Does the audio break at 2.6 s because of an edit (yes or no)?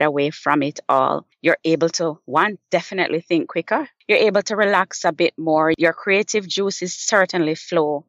no